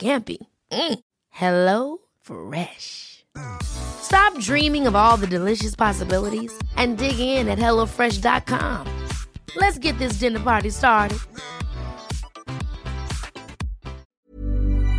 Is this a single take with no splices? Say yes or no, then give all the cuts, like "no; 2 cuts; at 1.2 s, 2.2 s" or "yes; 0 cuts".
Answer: no; 1 cut; at 14.1 s